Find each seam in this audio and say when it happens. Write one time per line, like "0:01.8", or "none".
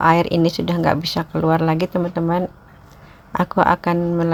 none